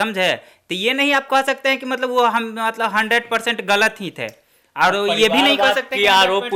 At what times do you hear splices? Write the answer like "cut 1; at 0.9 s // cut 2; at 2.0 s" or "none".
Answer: none